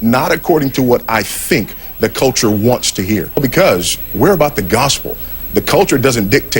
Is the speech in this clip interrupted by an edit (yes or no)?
yes